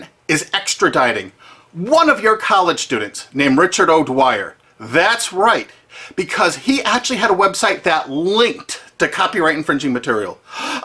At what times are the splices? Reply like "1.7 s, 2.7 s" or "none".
none